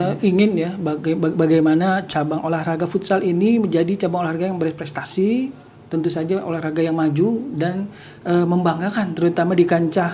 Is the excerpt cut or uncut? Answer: uncut